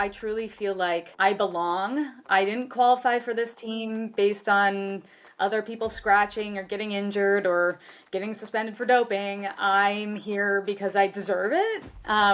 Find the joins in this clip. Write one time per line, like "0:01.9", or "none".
0:01.1